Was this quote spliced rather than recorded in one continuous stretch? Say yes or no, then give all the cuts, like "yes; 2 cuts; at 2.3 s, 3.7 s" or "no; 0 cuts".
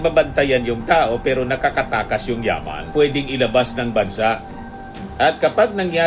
yes; 1 cut; at 2.8 s